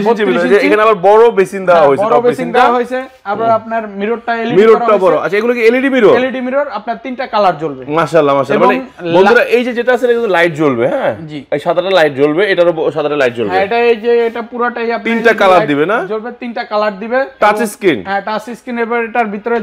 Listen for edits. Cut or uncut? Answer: uncut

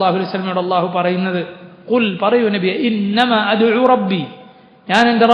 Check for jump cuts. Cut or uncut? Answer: uncut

